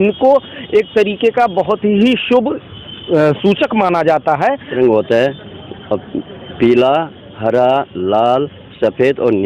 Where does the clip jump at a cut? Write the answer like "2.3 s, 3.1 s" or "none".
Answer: 4.7 s